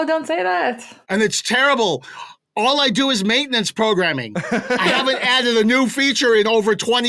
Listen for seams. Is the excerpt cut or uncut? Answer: uncut